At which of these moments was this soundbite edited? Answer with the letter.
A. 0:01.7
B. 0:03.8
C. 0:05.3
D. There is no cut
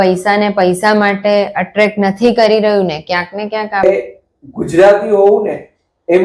B